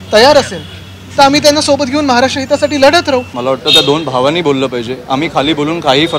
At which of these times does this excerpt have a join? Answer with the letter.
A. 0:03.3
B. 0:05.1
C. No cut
A